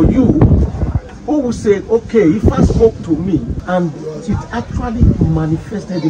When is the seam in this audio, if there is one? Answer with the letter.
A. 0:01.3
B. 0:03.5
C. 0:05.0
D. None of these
B